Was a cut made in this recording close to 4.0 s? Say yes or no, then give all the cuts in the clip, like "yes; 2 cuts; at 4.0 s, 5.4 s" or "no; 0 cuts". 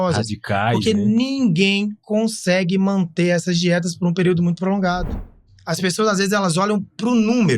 no; 1 cut; at 5.4 s